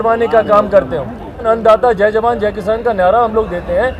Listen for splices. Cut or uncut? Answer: cut